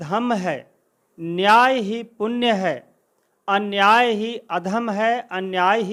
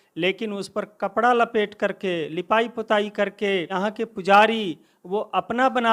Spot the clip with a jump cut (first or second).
second